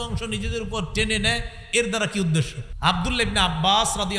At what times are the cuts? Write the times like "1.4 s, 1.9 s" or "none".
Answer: 2.6 s